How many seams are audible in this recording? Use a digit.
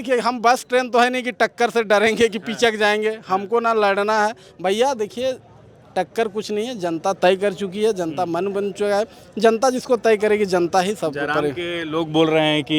0